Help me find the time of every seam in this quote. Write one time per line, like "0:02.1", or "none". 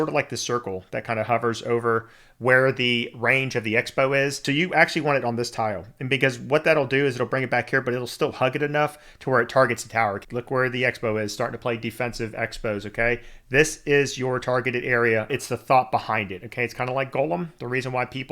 0:04.4
0:10.2
0:15.3